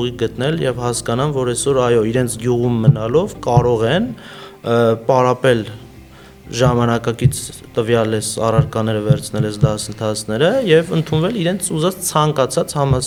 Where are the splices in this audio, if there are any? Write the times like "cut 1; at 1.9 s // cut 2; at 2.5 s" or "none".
none